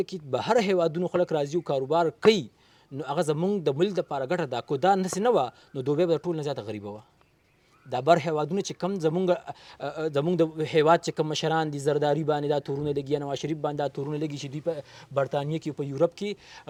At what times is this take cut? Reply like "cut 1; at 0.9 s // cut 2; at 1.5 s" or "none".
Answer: none